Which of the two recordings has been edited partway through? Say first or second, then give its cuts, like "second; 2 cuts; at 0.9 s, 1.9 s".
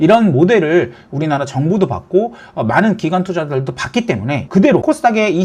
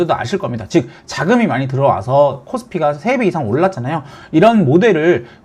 first; 1 cut; at 4.4 s